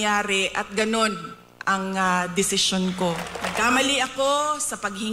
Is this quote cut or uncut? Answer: cut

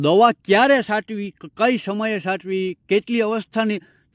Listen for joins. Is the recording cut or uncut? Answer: uncut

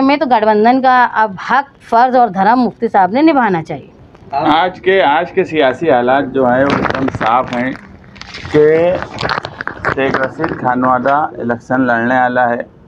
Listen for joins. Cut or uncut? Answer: cut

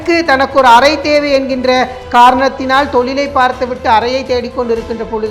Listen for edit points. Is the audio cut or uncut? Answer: uncut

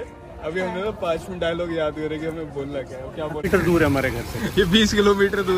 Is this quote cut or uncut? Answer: cut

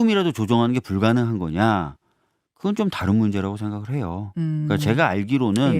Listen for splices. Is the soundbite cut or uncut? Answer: uncut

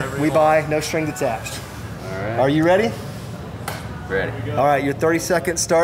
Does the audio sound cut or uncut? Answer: cut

